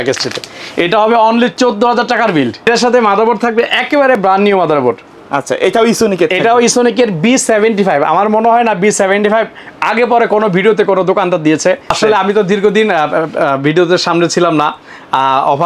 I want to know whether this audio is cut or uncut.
cut